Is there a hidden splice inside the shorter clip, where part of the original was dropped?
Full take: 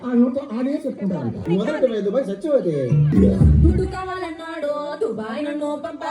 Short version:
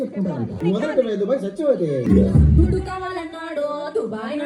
yes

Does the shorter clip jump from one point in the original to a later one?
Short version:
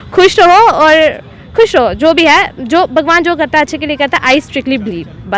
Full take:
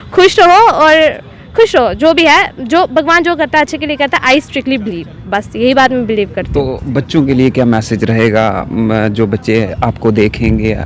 no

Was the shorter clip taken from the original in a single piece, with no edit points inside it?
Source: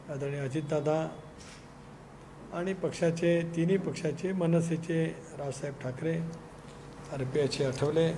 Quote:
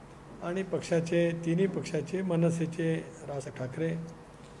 no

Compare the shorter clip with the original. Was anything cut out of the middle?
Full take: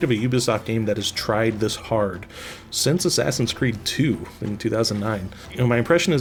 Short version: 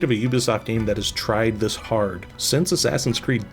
yes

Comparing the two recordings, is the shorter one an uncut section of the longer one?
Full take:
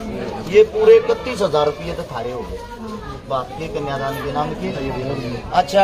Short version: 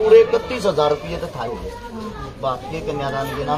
no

